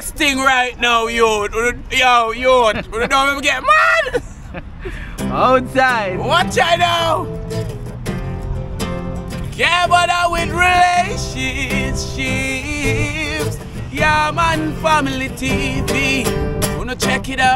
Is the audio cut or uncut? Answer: uncut